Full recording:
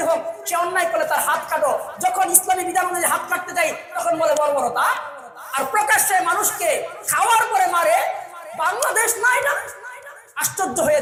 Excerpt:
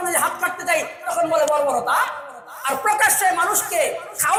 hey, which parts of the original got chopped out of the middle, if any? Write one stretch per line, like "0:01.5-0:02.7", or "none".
none